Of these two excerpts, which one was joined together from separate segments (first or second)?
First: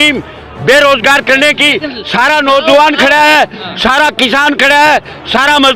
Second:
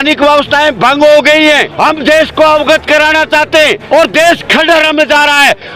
second